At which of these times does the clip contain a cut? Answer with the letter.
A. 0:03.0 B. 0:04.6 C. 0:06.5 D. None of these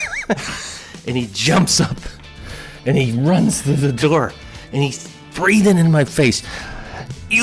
C